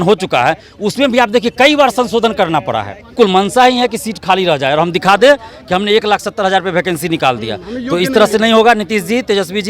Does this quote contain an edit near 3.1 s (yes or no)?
yes